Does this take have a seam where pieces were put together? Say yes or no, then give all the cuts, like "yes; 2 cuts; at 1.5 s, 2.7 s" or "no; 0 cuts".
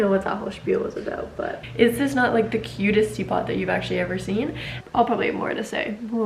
yes; 2 cuts; at 1.6 s, 4.8 s